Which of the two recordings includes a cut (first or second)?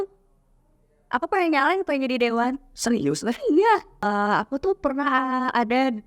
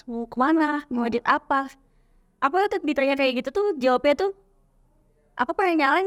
first